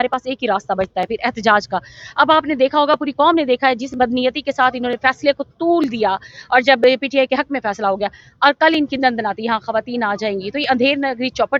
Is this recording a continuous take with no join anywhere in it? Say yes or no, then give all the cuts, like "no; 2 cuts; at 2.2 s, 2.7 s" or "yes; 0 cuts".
yes; 0 cuts